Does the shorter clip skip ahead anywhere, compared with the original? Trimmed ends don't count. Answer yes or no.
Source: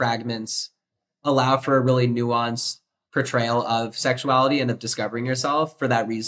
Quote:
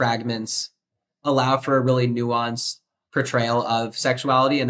no